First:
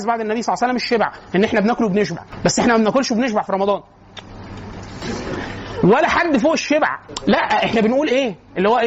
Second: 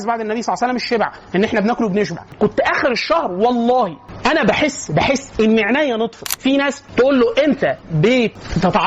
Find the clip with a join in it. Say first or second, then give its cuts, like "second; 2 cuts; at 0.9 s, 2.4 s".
second; 3 cuts; at 2.3 s, 6.3 s, 7.8 s